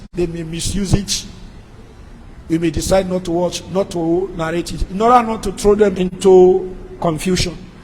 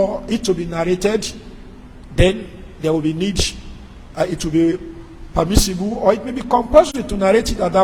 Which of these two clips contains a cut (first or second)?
first